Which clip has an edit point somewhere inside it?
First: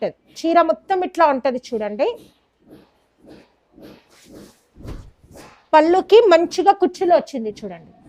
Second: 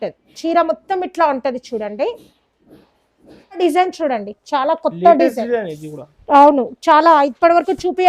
second; 1 cut; at 3.6 s

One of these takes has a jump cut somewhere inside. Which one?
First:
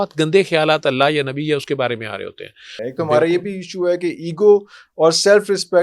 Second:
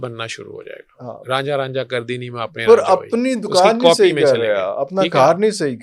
first; 1 cut; at 2.7 s

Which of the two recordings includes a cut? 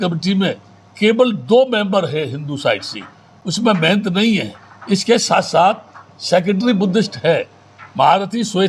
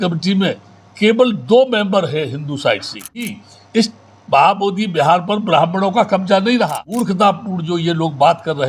second; 2 cuts; at 3.4 s, 7.0 s

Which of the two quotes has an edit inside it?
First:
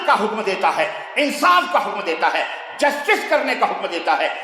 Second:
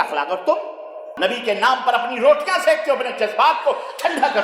second; 1 cut; at 1.1 s

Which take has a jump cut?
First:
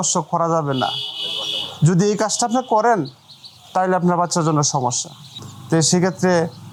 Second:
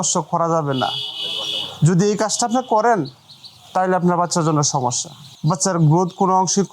second; 1 cut; at 5.4 s

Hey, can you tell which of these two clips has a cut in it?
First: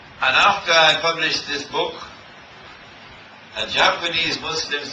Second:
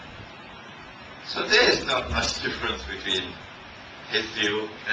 first; 1 cut; at 2.6 s

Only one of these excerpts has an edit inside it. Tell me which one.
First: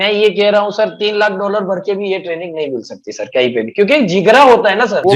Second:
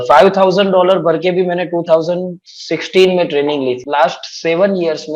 second; 1 cut; at 3.8 s

